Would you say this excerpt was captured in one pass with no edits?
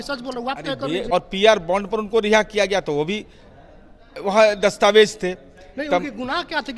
no; 1 cut; at 1.1 s

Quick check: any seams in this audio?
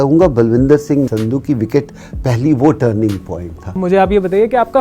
yes; 2 cuts; at 1.1 s, 3.8 s

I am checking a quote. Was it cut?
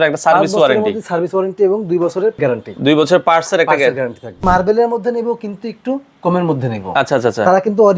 yes; 2 cuts; at 2.4 s, 4.4 s

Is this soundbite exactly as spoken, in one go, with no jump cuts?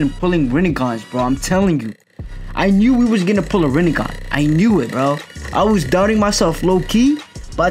yes; 0 cuts

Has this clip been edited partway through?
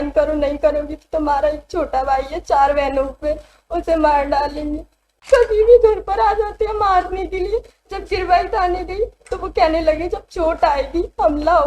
yes; 1 cut; at 5.1 s

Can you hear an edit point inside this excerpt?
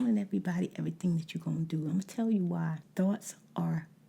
yes; 1 cut; at 2.8 s

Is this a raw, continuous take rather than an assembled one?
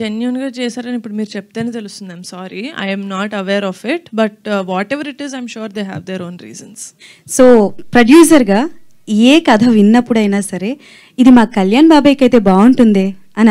no; 1 cut; at 7.1 s

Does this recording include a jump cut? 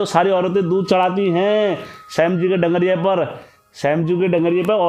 no; 0 cuts

